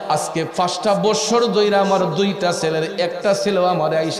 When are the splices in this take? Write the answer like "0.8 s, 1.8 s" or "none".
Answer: none